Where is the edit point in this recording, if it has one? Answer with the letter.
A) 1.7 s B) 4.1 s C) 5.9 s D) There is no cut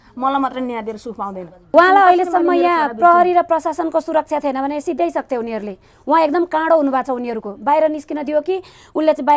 A